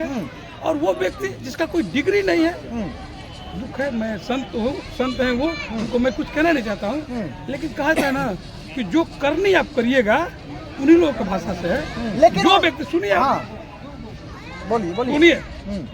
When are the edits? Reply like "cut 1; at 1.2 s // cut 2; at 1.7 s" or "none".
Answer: cut 1; at 12.0 s